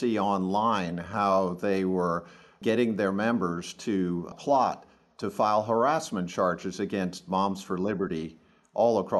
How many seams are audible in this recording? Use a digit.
2